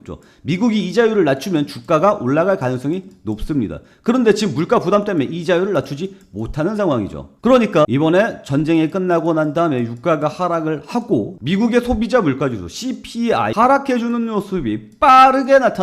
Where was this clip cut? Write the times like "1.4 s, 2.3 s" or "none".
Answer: 7.9 s, 11.3 s